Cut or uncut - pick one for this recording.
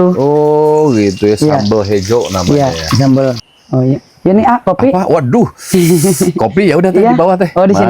cut